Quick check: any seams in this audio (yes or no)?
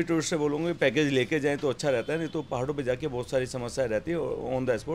no